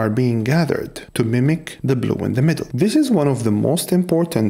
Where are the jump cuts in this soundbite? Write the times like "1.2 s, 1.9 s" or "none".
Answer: 2.7 s

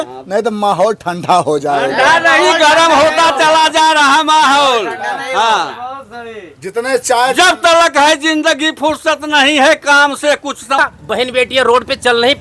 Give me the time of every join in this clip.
10.8 s

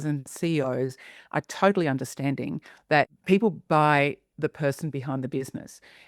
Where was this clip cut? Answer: 3.2 s

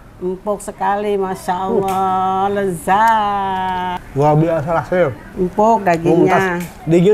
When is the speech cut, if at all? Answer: 4.0 s, 5.2 s

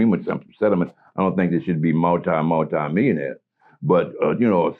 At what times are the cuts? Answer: none

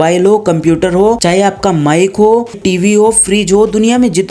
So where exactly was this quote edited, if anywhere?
1.2 s, 2.6 s

